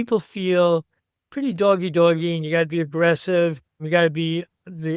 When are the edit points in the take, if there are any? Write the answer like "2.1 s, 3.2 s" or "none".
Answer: 3.8 s

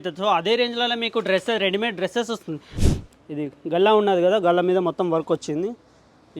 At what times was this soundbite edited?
2.7 s

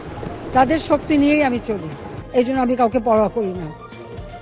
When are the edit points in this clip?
2.2 s

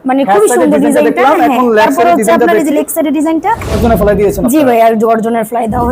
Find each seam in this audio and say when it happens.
3.8 s

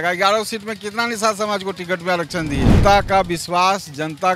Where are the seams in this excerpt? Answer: 2.8 s

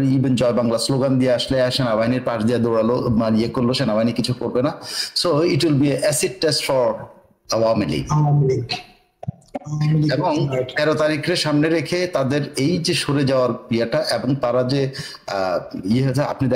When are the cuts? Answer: none

